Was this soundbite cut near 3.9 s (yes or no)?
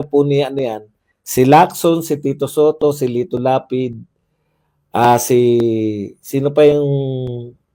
no